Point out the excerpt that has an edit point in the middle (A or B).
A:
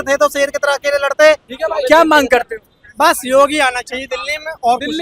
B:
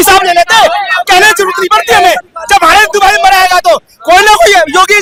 A